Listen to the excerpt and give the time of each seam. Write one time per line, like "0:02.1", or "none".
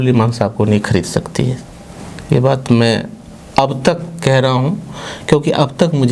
none